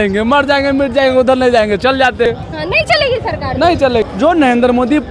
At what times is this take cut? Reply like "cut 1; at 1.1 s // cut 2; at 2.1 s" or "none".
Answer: cut 1; at 2.2 s // cut 2; at 4.1 s